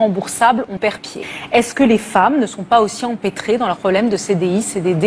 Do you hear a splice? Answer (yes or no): no